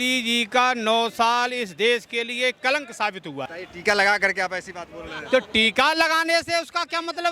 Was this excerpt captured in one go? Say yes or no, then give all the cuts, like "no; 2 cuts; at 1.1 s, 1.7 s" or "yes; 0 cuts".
no; 1 cut; at 3.5 s